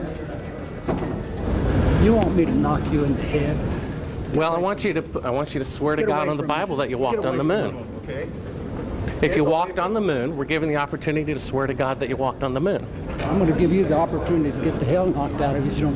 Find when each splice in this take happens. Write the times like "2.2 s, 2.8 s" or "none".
1.4 s